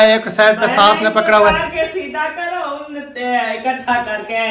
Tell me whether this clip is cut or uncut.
uncut